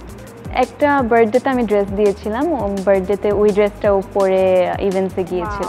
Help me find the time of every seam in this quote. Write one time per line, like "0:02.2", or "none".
none